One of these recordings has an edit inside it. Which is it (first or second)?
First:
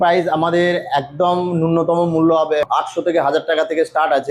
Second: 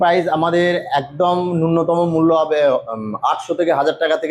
first